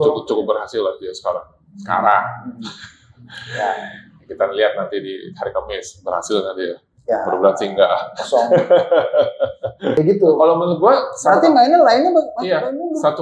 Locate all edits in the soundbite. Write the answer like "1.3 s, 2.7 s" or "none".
10.0 s